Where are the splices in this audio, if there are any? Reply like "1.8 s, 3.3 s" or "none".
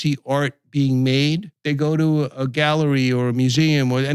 1.5 s